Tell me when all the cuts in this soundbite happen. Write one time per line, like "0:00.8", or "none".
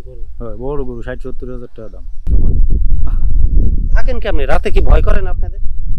0:02.1